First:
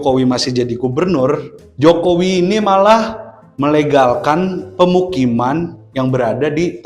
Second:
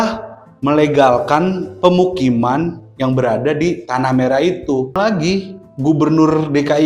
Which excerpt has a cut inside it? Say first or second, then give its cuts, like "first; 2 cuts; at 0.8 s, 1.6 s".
second; 1 cut; at 5.0 s